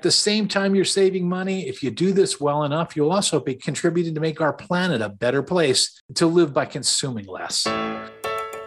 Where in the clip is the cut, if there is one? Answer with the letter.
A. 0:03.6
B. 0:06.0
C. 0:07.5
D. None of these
C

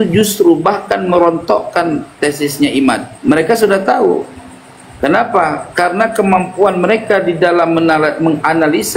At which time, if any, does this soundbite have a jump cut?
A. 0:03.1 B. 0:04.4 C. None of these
A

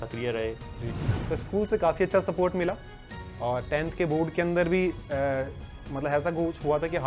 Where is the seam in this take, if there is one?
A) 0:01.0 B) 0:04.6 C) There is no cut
A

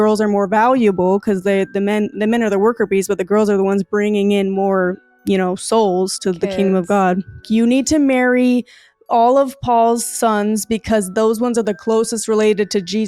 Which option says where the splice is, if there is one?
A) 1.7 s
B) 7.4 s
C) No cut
B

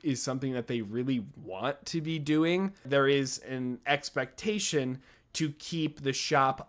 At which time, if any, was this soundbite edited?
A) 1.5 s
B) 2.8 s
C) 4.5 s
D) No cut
B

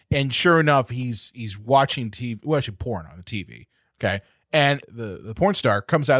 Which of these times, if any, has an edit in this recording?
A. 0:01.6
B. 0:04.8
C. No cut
B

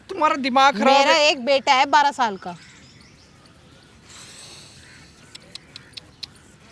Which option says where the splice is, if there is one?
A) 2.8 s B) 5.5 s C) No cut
C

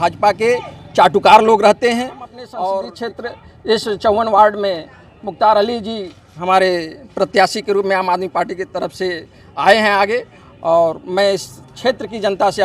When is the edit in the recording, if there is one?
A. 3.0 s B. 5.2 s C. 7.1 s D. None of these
A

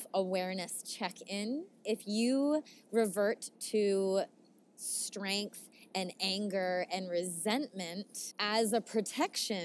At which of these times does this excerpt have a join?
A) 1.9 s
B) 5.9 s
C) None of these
A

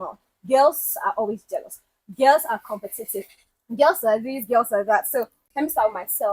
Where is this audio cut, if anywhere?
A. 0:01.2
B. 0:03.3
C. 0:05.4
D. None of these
C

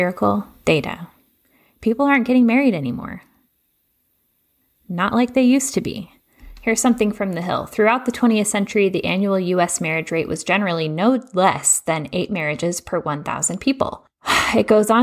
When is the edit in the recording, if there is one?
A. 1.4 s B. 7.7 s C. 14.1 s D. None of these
C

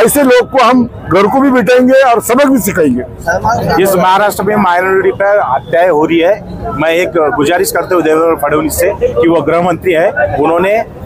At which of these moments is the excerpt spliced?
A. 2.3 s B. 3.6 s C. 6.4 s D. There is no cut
B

